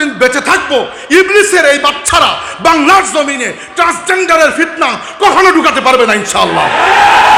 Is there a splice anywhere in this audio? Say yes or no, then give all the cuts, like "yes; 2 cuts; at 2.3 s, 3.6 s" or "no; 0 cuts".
no; 0 cuts